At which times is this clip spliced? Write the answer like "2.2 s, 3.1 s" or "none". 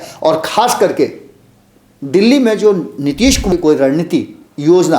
3.5 s